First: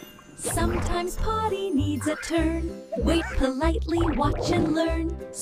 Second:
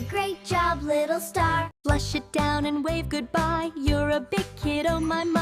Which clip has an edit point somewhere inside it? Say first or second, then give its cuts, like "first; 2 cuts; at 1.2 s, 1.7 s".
second; 1 cut; at 1.7 s